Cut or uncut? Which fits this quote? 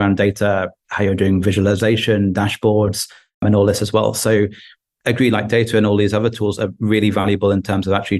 cut